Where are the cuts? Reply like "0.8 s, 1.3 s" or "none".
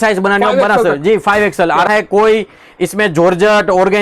1.9 s